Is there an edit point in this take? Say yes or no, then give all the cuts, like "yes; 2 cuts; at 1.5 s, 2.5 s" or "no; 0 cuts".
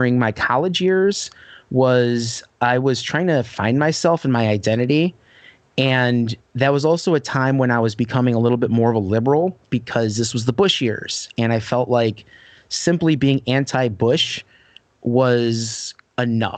no; 0 cuts